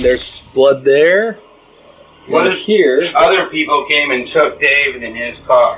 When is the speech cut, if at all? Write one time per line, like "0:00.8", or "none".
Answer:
none